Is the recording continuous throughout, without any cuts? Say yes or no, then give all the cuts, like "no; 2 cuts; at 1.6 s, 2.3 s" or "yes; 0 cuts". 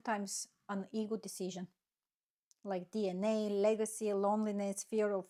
yes; 0 cuts